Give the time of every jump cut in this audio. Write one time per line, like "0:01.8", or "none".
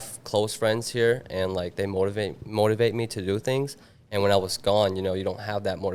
none

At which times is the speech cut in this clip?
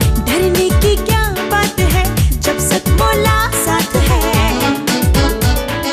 none

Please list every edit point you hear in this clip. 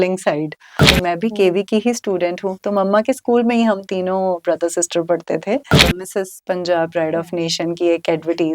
0:00.9
0:05.9

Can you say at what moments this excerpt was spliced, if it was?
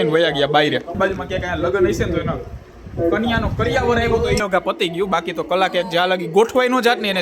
0:00.9
0:04.4

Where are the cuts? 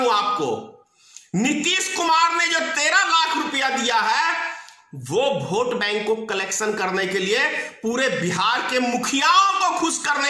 none

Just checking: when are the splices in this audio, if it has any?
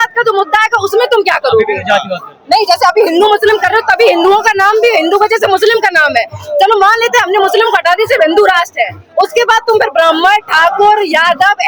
none

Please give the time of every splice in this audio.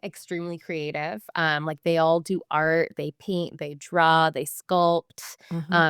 none

